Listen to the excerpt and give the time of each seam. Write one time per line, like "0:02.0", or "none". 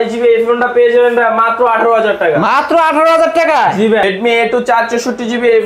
0:04.0

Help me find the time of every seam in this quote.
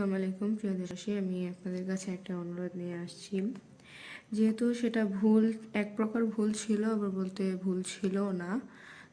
0:00.9

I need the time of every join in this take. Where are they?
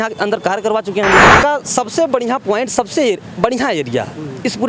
0:01.3

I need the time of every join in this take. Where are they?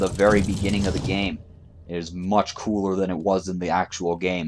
none

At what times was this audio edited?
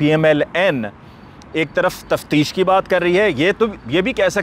none

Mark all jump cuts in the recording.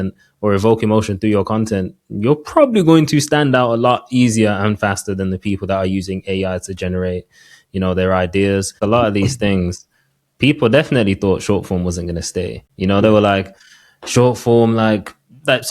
0:08.8
0:12.6

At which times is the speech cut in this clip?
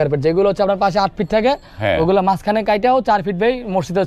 none

